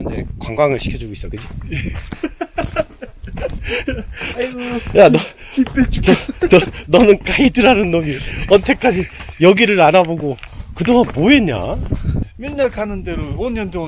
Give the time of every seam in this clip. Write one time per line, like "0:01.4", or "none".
0:12.3